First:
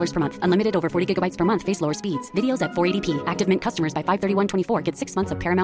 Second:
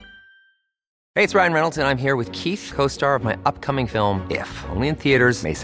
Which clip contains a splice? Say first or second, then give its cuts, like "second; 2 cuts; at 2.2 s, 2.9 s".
second; 1 cut; at 0.9 s